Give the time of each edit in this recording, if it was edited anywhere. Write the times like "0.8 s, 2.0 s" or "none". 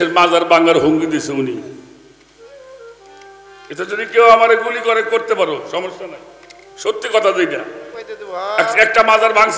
none